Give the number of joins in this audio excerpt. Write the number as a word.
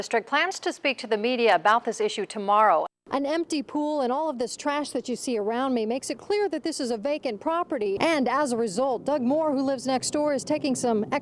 two